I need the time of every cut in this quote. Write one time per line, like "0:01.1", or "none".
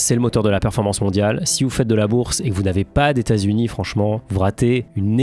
none

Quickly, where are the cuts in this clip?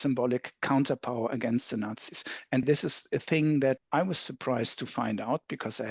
0:02.6
0:03.8

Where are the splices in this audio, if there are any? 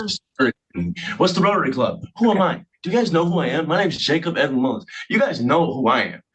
none

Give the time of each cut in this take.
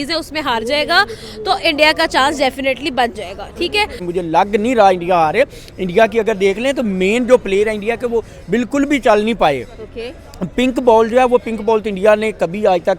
0:04.0

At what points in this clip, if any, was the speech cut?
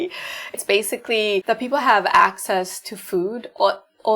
0:01.4

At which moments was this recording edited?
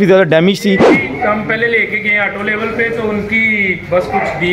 0:00.9

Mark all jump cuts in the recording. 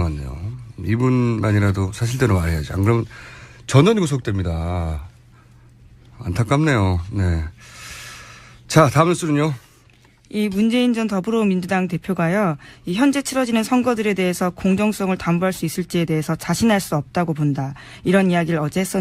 0:02.0

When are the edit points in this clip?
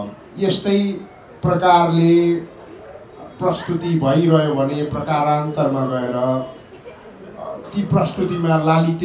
none

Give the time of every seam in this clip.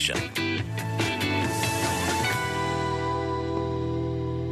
none

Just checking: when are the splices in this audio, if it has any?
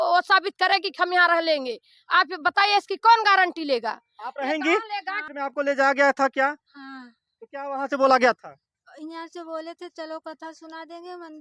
0:05.5

